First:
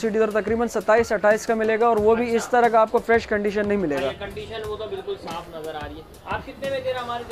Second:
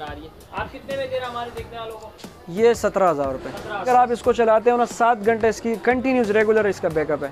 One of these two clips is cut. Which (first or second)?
second